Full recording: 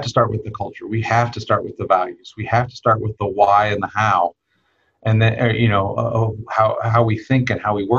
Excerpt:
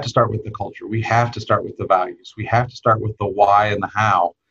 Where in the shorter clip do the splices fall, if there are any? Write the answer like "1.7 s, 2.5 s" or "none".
none

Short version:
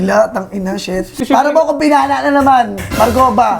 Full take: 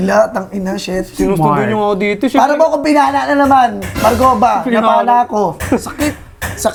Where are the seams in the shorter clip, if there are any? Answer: 1.1 s

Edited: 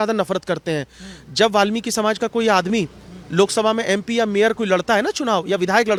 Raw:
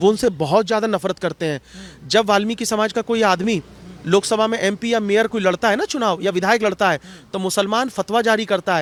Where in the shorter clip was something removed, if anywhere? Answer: none

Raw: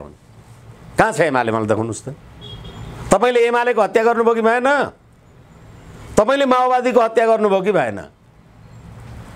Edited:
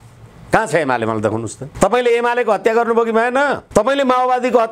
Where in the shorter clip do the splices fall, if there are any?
1.6 s, 3.6 s

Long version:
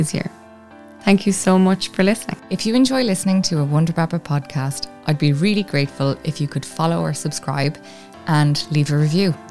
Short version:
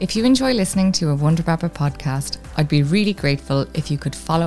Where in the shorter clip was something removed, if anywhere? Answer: none

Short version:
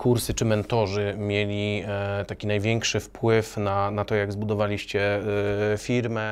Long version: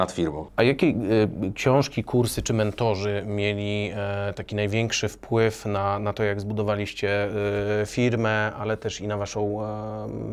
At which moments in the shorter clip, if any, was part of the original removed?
none

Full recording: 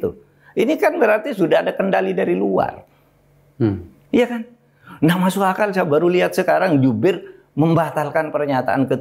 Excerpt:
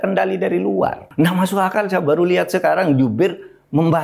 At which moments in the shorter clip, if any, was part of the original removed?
1.0 s

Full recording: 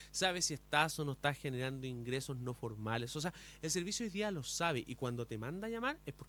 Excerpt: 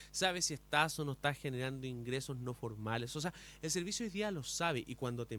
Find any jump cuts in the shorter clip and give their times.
none

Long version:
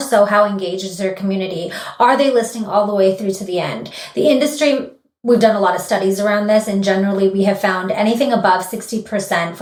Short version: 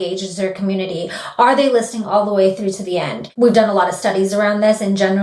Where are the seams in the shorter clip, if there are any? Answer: 3.2 s

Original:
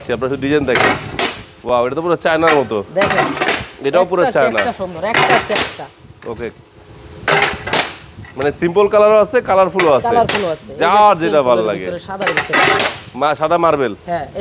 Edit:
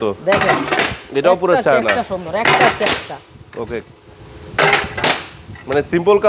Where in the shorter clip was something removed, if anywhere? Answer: none

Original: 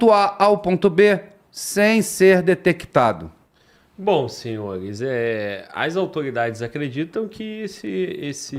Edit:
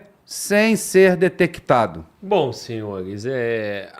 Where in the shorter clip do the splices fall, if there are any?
2.1 s

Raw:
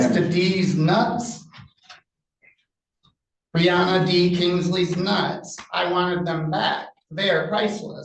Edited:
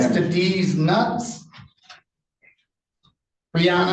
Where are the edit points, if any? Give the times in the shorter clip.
none

